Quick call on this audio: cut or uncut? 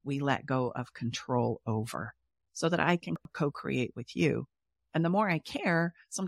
cut